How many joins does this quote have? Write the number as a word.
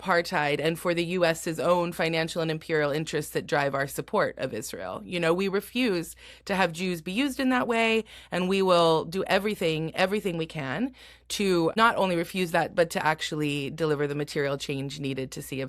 one